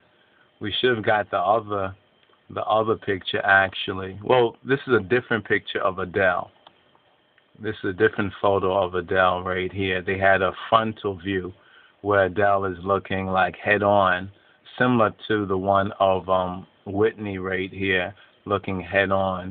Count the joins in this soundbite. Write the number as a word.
one